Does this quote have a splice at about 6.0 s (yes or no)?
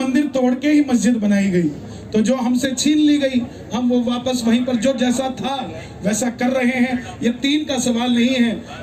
no